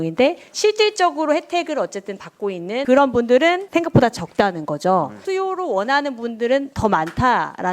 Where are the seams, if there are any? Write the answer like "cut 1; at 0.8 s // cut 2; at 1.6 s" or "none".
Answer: cut 1; at 3.6 s // cut 2; at 5.2 s